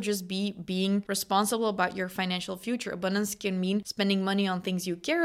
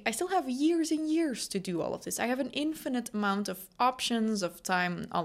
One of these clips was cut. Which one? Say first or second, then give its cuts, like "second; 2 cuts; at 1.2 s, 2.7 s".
first; 2 cuts; at 1.1 s, 3.9 s